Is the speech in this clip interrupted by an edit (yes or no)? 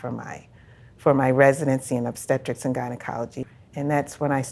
yes